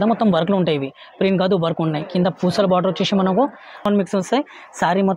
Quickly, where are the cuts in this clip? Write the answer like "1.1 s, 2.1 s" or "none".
3.8 s